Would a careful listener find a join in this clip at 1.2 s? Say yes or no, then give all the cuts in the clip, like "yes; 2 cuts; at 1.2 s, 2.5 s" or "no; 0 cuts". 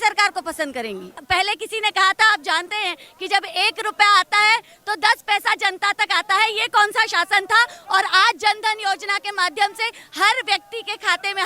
yes; 1 cut; at 1.2 s